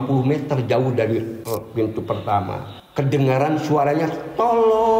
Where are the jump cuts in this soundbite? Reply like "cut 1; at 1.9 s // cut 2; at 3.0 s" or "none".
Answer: cut 1; at 1.4 s // cut 2; at 2.7 s